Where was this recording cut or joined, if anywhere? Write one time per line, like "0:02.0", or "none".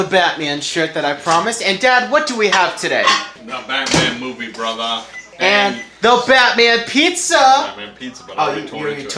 none